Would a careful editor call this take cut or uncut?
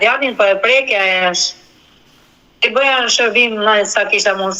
uncut